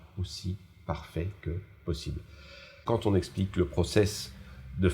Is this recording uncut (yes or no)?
no